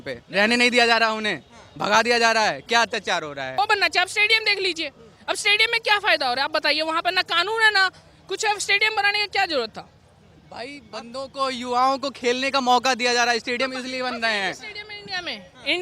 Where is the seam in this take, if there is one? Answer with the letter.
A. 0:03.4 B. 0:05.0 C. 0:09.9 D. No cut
A